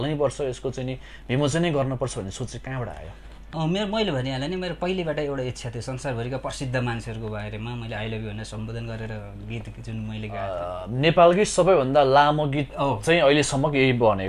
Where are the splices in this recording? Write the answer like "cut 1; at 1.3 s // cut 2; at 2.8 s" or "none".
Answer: cut 1; at 10.5 s